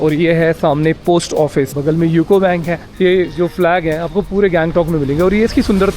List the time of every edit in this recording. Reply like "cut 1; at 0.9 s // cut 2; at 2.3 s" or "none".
cut 1; at 1.7 s // cut 2; at 2.8 s